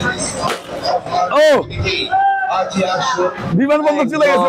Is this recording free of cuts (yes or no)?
yes